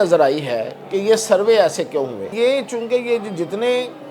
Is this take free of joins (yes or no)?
no